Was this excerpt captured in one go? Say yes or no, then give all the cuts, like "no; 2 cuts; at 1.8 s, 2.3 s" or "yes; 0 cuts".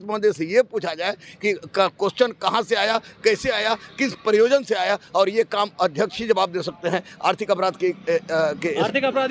yes; 0 cuts